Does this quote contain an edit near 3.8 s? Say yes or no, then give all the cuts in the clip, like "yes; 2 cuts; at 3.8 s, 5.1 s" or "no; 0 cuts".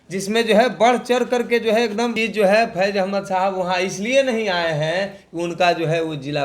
no; 1 cut; at 2.1 s